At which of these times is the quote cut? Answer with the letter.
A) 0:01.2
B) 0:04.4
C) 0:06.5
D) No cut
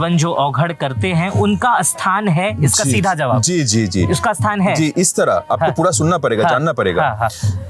D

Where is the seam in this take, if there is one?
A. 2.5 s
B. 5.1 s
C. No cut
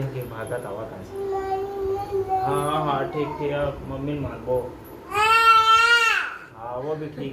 B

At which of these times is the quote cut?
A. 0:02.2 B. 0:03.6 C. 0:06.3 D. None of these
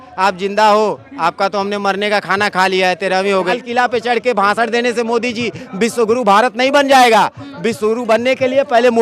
B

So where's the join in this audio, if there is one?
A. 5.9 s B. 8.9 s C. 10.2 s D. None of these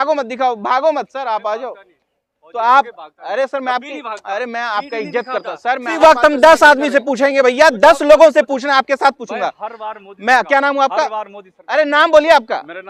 A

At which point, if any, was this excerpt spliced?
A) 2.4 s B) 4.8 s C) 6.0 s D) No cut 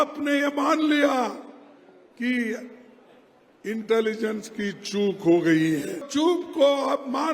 C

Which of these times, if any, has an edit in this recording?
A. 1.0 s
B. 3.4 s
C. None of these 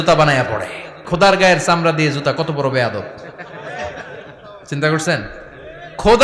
A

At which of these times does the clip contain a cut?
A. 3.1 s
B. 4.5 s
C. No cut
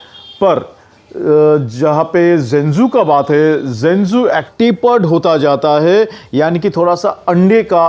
B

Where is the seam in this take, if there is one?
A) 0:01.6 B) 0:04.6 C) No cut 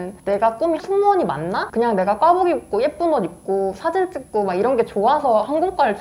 A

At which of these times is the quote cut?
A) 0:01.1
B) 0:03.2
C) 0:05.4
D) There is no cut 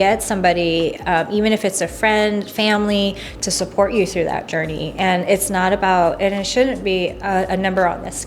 D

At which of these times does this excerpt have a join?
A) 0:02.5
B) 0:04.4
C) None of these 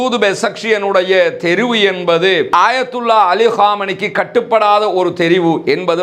A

